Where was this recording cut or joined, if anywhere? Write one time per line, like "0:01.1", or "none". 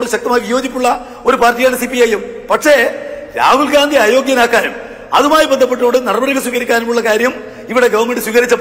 none